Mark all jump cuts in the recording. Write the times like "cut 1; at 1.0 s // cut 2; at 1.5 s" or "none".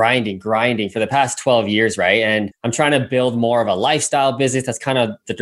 cut 1; at 2.6 s